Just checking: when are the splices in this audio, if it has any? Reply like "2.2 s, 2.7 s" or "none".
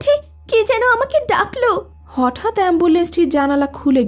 2.0 s

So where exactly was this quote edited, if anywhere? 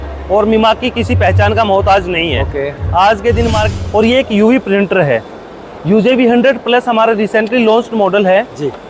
3.7 s

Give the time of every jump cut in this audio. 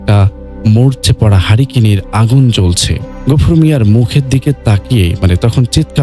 none

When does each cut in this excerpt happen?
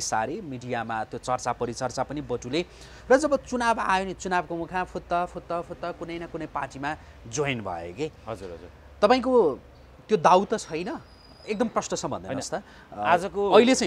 none

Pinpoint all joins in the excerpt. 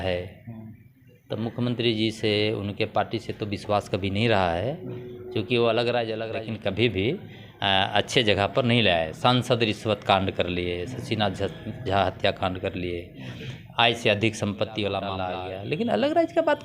6.3 s, 15.2 s

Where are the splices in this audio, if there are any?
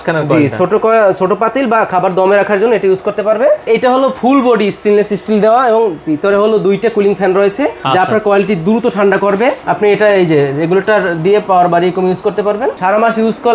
3.6 s, 7.8 s, 9.6 s, 12.8 s

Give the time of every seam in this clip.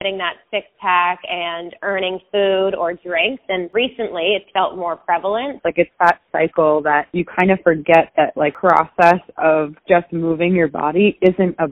3.6 s, 5.6 s, 8.5 s

